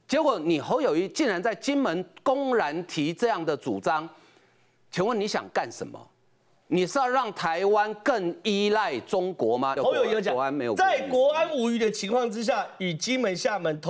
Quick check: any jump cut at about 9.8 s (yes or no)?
yes